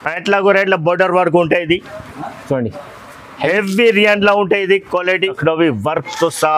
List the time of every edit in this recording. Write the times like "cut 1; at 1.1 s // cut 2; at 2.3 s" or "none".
cut 1; at 5.4 s